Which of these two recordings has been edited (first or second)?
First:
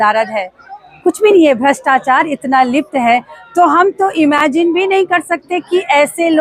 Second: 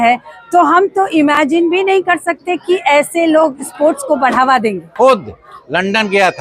second